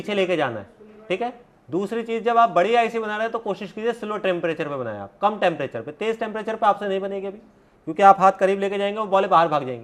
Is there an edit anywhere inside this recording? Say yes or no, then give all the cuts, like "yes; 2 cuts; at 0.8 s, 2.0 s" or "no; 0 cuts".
no; 0 cuts